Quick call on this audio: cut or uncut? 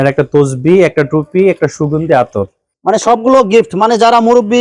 uncut